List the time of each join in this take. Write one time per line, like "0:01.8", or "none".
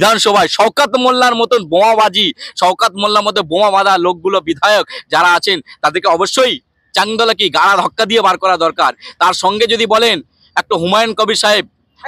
none